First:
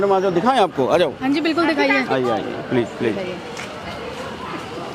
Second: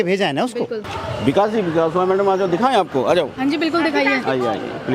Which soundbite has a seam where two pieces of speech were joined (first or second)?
second